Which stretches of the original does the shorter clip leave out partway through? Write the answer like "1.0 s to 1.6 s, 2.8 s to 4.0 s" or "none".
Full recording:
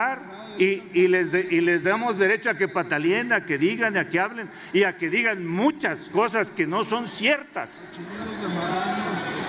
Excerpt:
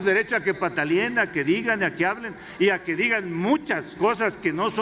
none